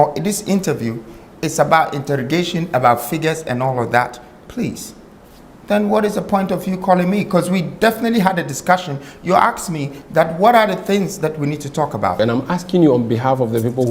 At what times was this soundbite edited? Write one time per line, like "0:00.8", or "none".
0:12.2